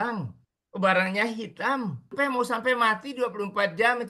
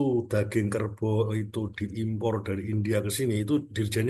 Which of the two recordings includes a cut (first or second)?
first